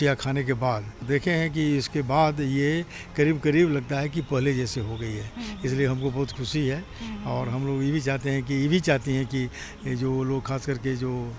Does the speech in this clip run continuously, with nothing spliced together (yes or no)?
no